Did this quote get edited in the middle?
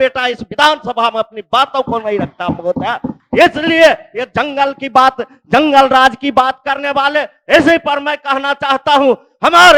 no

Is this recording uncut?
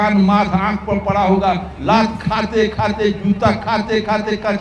yes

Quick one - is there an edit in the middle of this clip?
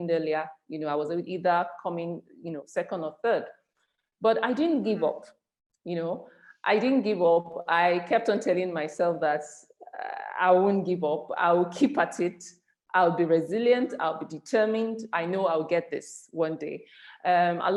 no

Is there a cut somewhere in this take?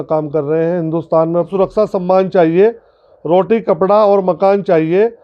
yes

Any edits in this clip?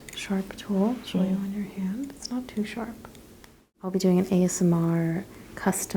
yes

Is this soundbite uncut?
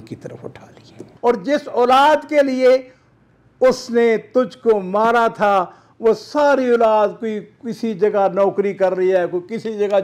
no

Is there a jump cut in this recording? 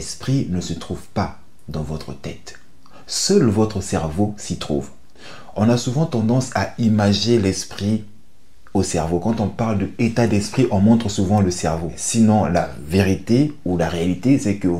yes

